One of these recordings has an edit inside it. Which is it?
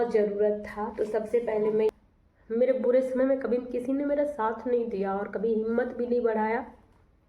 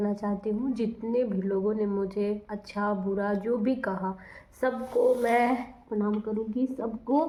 first; 1 cut; at 1.9 s

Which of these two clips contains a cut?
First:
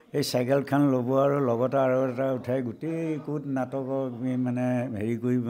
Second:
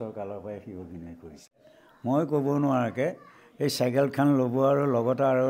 second; 1 cut; at 1.5 s

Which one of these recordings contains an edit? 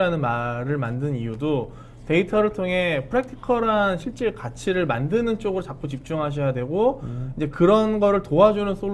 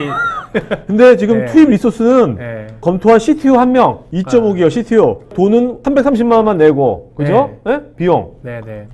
second; 3 cuts; at 2.8 s, 4.0 s, 5.4 s

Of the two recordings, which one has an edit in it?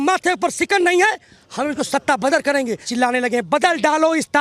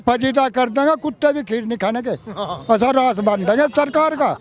first; 1 cut; at 2.9 s

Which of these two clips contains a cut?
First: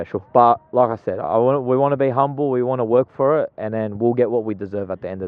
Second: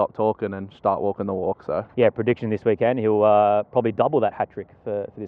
second; 1 cut; at 1.9 s

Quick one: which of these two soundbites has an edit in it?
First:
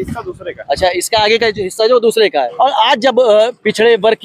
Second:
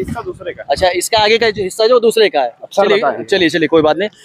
first; 1 cut; at 2.5 s

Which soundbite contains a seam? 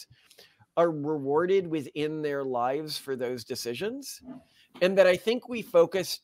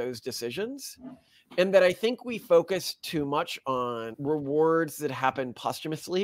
second; 1 cut; at 4.1 s

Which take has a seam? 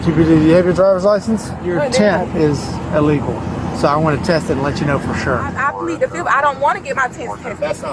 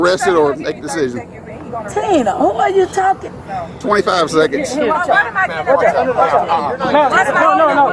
first; 2 cuts; at 1.6 s, 5.6 s

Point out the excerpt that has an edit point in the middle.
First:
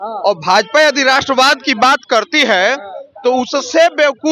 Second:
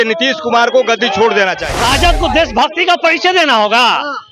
second; 1 cut; at 1.7 s

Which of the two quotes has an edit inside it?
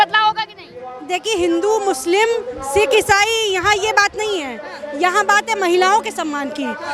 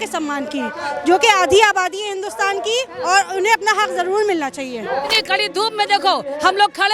second; 1 cut; at 5.1 s

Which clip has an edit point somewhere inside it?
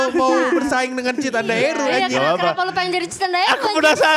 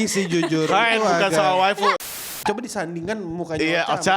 second; 1 cut; at 2.2 s

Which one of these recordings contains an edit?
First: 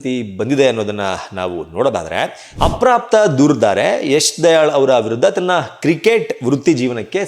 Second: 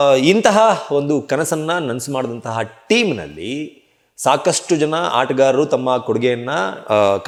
first; 1 cut; at 2.5 s

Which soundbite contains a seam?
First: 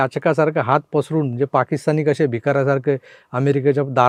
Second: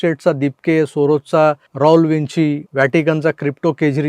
second; 2 cuts; at 1.7 s, 2.6 s

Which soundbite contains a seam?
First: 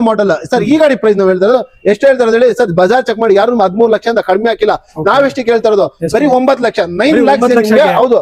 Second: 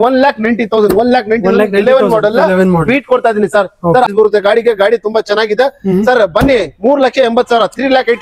second; 1 cut; at 4.1 s

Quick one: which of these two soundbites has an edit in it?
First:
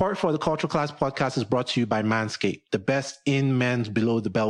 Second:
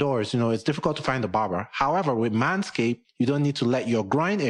second; 1 cut; at 3.0 s

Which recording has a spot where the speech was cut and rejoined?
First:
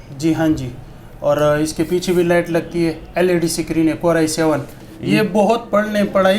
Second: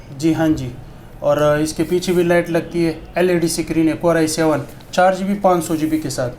first; 1 cut; at 4.8 s

